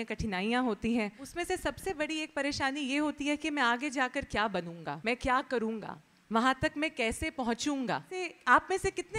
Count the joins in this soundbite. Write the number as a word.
three